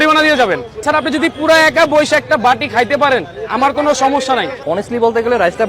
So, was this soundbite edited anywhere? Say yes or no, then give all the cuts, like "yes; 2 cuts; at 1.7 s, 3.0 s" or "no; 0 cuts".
yes; 1 cut; at 4.6 s